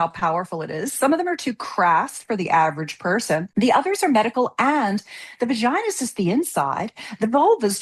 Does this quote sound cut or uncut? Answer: cut